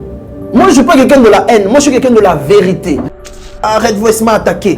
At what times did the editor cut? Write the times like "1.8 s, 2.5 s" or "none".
3.4 s